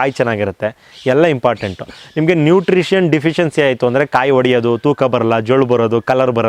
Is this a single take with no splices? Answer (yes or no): yes